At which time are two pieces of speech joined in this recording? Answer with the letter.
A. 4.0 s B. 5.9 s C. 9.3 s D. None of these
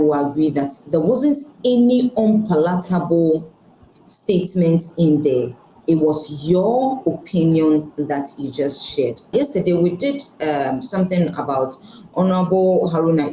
C